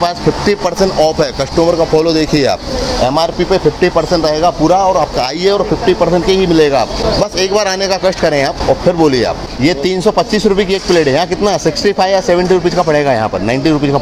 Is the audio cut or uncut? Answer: cut